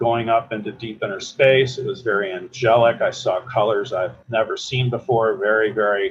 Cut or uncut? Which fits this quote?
uncut